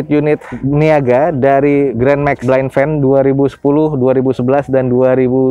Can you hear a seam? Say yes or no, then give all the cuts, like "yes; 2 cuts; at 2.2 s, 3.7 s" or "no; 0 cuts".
no; 0 cuts